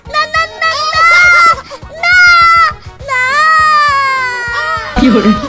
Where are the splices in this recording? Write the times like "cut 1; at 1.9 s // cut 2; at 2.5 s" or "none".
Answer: none